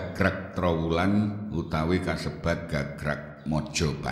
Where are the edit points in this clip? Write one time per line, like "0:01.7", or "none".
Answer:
none

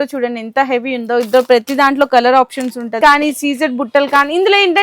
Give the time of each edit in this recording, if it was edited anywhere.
0:03.0

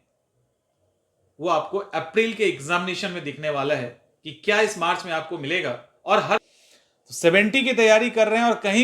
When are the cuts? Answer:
0:06.5

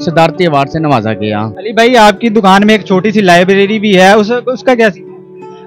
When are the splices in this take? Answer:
0:01.6

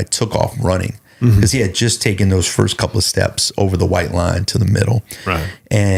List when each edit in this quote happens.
none

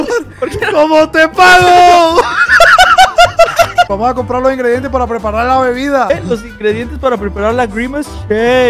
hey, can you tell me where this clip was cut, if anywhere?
0:03.9
0:06.1

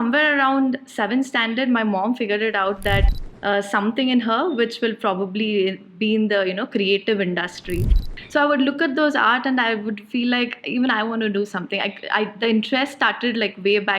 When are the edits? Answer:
0:03.1
0:07.9

